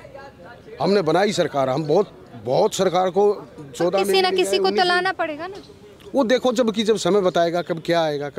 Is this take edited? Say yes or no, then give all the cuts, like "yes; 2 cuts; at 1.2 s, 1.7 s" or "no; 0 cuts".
no; 0 cuts